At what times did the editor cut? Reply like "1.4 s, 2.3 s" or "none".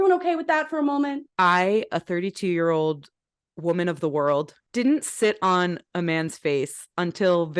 1.2 s, 4.6 s